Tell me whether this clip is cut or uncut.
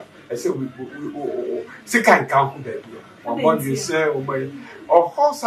uncut